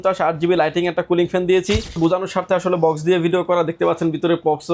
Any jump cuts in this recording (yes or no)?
yes